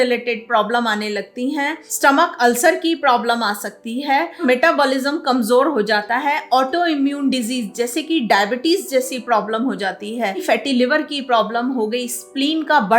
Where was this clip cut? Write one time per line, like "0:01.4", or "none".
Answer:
0:01.8
0:04.4
0:10.4